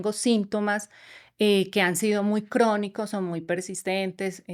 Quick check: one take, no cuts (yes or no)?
yes